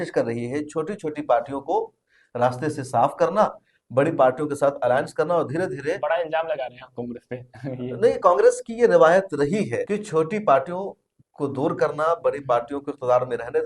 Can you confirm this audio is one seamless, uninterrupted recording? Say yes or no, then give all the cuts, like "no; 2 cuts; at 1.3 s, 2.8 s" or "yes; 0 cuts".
yes; 0 cuts